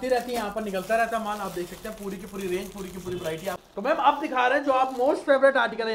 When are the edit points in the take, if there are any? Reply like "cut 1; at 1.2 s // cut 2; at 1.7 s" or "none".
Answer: cut 1; at 3.6 s